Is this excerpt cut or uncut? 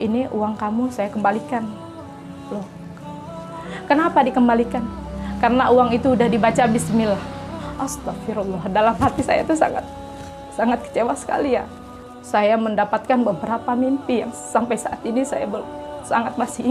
cut